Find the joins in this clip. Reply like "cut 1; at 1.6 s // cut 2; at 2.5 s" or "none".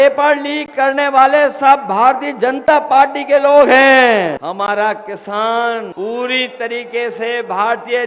cut 1; at 4.4 s // cut 2; at 5.9 s